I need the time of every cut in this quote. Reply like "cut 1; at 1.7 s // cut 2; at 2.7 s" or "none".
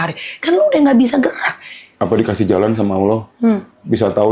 cut 1; at 1.9 s